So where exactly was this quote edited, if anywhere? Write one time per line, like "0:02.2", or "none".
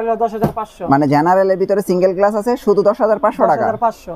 none